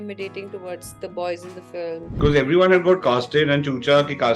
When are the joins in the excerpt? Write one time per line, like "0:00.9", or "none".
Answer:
0:02.1